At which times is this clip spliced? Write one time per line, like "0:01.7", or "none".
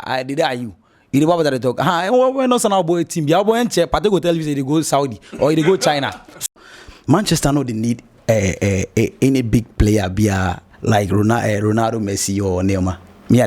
0:06.4